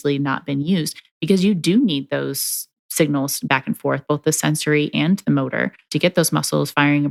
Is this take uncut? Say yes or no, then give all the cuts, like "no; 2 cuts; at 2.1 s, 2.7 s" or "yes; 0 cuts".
yes; 0 cuts